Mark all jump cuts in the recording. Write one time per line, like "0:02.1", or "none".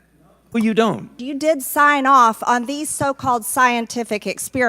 0:01.1

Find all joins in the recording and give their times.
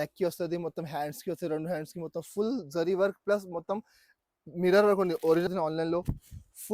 0:05.5

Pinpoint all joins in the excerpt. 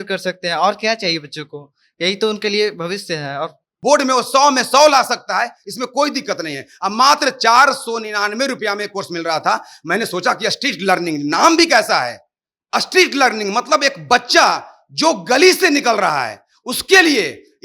0:03.7

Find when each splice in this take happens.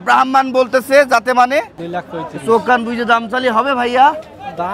0:01.8

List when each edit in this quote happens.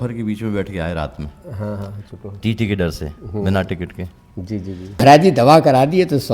0:05.2

